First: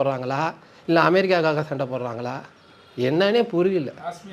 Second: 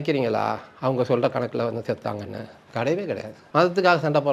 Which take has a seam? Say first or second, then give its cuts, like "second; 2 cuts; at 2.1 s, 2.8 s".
second; 1 cut; at 3.3 s